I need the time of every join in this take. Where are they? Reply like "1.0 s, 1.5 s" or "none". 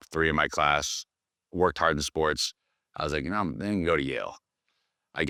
none